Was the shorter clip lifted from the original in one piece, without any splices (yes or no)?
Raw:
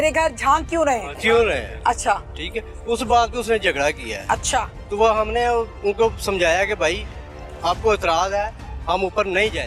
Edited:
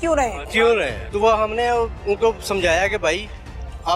no